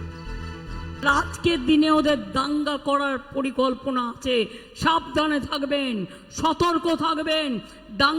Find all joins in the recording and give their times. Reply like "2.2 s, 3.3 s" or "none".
1.1 s